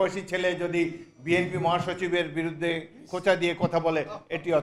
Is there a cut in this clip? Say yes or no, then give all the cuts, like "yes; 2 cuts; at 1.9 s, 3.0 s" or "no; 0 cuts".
no; 0 cuts